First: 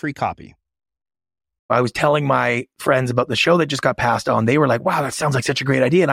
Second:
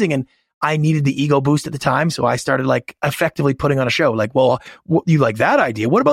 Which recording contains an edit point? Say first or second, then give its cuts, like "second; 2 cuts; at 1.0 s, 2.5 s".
first; 1 cut; at 1.7 s